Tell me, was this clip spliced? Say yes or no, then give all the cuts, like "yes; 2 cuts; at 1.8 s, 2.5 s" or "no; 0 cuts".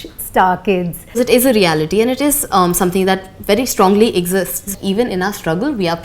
yes; 2 cuts; at 1.2 s, 4.7 s